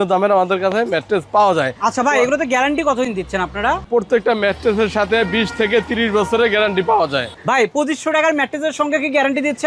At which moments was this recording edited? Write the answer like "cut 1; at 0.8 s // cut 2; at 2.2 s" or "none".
none